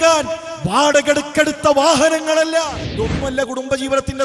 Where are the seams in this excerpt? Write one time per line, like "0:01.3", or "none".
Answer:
0:02.8